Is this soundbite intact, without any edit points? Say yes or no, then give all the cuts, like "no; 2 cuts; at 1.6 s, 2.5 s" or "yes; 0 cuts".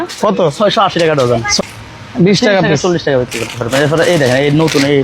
no; 1 cut; at 1.5 s